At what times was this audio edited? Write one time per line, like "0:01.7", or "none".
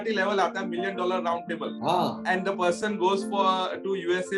0:01.9